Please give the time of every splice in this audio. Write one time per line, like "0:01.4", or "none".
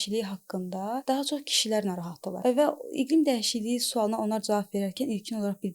0:01.0
0:02.3